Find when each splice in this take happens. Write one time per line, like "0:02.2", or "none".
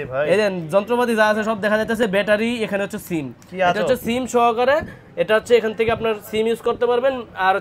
none

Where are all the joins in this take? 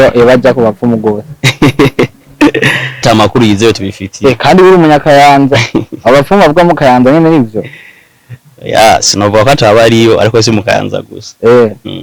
0:03.0

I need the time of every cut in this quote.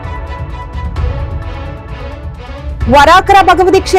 0:02.5

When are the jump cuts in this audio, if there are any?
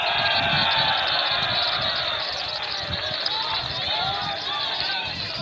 none

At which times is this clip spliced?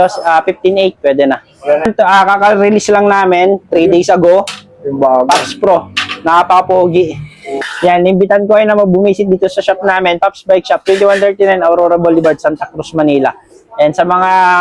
0:01.8
0:07.7

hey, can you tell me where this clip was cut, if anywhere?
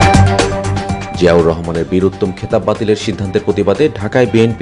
0:00.9

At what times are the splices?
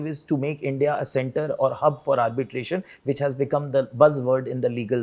none

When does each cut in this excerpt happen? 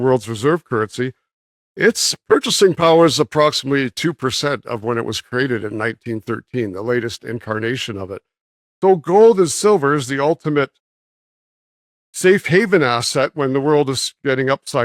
none

